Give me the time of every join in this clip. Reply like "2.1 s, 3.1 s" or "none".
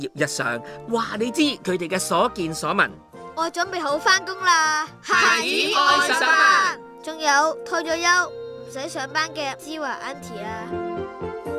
10.7 s